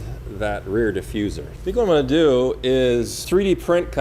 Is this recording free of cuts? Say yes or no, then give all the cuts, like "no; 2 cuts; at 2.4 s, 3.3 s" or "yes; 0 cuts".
no; 2 cuts; at 1.5 s, 3.2 s